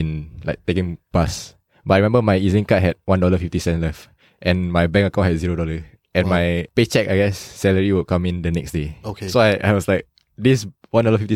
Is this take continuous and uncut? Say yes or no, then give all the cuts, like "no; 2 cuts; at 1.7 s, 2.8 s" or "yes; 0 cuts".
no; 1 cut; at 6.7 s